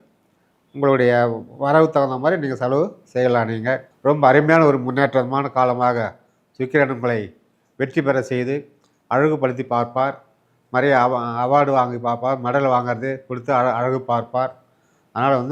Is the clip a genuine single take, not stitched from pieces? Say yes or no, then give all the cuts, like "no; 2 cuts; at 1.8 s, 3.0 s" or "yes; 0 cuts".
no; 1 cut; at 3.9 s